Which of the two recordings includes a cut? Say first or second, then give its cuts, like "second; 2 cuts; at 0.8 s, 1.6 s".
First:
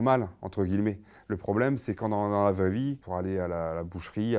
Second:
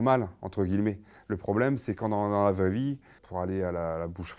first; 1 cut; at 3.0 s